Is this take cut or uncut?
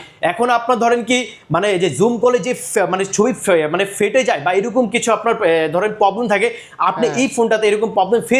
uncut